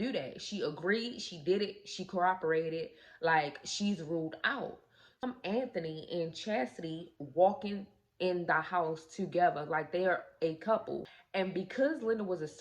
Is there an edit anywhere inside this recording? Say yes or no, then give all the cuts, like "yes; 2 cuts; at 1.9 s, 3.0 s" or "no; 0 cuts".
yes; 2 cuts; at 5.2 s, 11.1 s